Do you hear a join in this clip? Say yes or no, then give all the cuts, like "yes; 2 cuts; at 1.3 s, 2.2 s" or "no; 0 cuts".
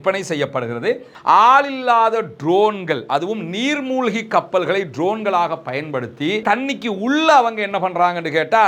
yes; 1 cut; at 1.1 s